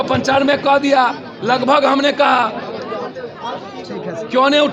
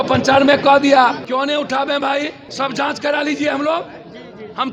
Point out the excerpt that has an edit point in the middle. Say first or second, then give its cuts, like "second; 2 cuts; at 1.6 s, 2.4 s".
second; 2 cuts; at 1.2 s, 2.4 s